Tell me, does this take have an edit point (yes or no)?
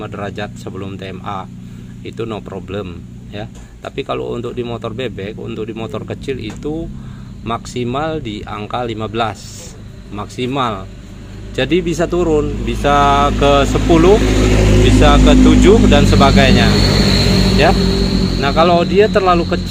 no